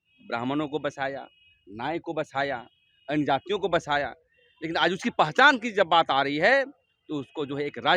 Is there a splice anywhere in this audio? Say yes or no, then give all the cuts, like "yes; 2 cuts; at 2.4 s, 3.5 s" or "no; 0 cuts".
no; 0 cuts